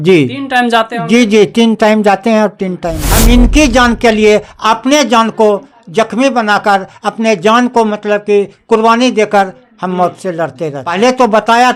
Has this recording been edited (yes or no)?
yes